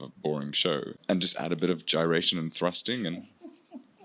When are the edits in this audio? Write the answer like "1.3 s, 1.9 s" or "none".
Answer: 0.9 s